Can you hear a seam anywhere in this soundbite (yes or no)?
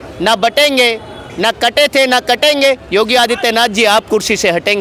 no